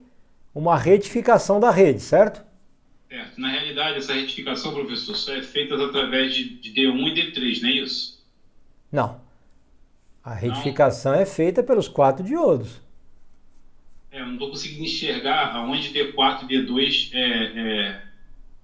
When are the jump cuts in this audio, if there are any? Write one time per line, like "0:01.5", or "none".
none